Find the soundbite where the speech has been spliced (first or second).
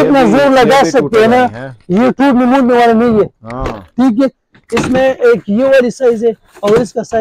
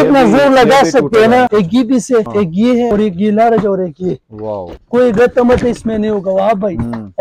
second